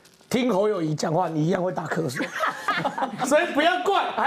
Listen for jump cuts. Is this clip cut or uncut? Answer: uncut